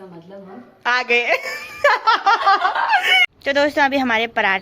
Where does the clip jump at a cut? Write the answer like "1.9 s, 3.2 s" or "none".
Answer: 3.2 s